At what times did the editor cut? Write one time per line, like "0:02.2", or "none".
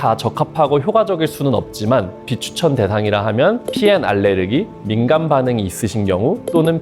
0:02.2